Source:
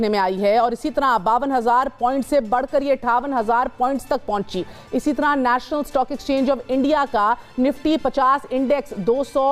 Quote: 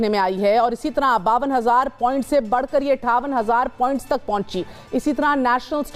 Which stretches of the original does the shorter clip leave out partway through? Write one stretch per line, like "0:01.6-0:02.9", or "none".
none